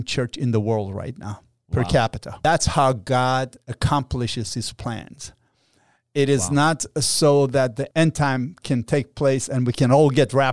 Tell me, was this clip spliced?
yes; 2 cuts; at 2.3 s, 7.9 s

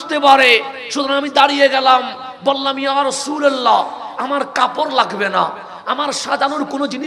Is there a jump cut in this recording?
no; 0 cuts

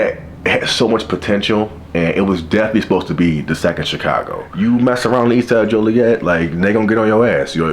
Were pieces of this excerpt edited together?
yes; 1 cut; at 4.4 s

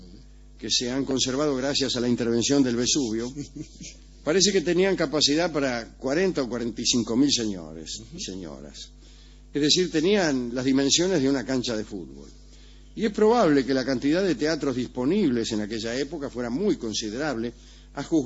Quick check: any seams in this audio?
no; 0 cuts

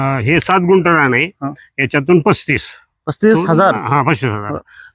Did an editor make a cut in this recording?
no; 0 cuts

